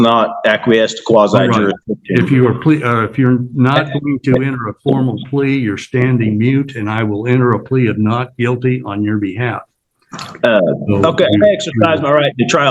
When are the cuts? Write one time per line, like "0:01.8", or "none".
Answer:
none